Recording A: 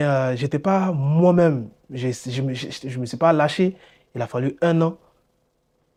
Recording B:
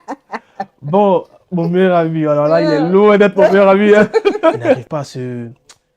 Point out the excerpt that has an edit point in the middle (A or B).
B